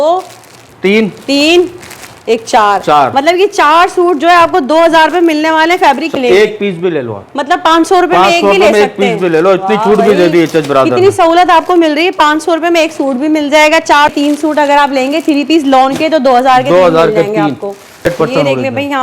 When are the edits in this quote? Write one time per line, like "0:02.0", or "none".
0:06.1
0:14.1
0:18.1